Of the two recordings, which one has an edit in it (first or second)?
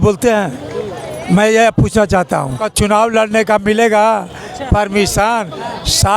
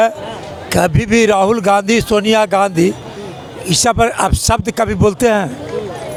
first